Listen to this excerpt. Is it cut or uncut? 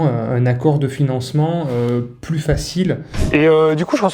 cut